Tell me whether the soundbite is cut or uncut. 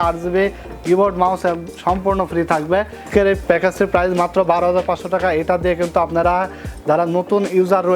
cut